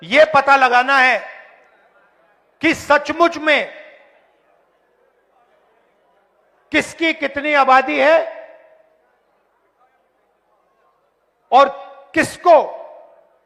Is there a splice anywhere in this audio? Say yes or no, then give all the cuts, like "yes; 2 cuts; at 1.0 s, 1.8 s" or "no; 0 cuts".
no; 0 cuts